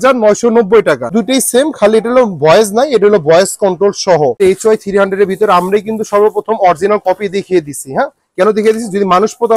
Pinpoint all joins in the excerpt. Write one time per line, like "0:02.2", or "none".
0:01.1
0:04.4